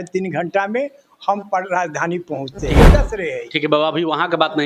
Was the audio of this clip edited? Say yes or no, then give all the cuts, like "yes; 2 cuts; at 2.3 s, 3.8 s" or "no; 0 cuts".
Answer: yes; 1 cut; at 2.7 s